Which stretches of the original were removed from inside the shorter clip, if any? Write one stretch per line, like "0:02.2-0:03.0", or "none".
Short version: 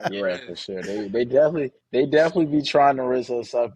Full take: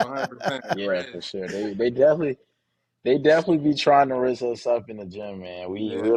0:02.4-0:02.9